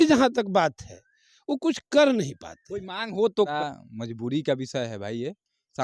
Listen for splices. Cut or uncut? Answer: cut